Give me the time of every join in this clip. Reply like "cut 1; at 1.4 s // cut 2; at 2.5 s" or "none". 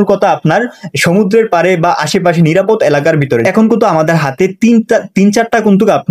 none